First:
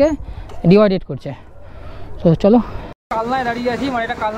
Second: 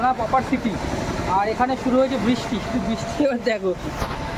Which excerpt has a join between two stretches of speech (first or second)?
first